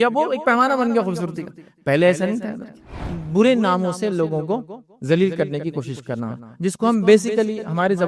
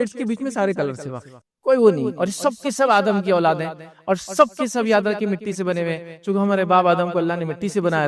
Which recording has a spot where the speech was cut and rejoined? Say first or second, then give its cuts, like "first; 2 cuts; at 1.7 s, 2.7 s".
first; 1 cut; at 2.9 s